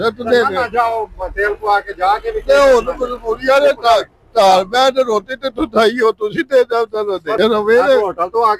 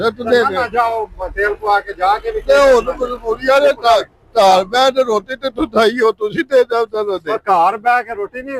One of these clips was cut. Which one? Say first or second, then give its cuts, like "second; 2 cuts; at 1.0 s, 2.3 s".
first; 1 cut; at 7.4 s